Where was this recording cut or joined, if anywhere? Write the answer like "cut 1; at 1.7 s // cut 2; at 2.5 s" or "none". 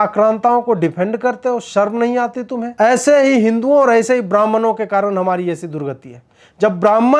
cut 1; at 2.6 s